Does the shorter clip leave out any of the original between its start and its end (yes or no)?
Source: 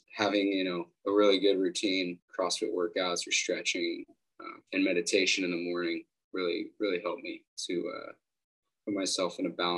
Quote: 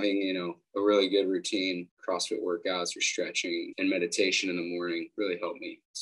yes